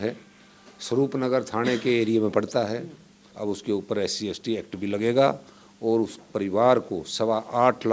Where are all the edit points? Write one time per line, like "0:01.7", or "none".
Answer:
0:03.3